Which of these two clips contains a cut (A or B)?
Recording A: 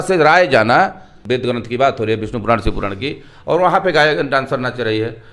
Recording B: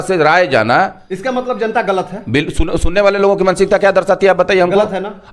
B